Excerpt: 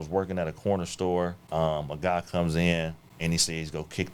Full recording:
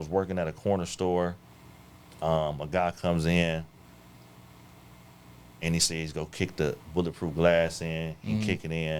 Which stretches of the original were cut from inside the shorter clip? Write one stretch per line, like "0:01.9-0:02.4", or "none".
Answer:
0:01.4-0:02.1
0:03.8-0:05.5